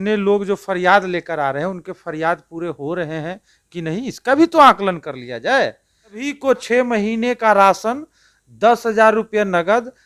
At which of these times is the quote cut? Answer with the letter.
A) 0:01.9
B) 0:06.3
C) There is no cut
B